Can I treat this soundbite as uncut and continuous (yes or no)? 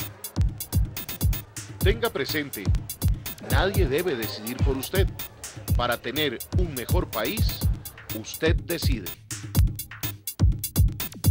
yes